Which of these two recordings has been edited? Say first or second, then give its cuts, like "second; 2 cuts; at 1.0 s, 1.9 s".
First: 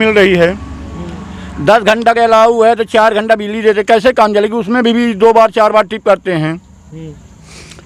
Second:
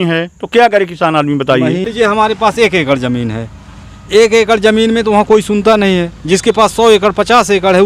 second; 1 cut; at 1.9 s